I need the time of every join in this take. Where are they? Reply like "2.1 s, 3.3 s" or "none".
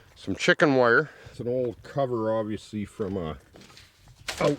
1.3 s